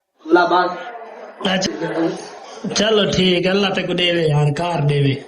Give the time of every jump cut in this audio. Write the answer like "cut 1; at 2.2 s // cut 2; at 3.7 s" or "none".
cut 1; at 1.7 s